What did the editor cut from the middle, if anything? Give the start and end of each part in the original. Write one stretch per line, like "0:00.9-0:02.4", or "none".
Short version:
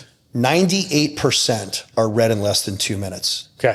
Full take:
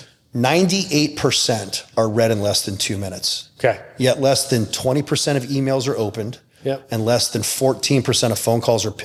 none